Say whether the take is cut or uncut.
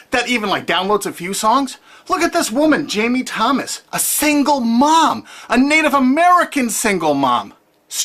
cut